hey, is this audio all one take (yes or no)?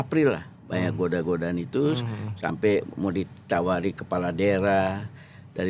yes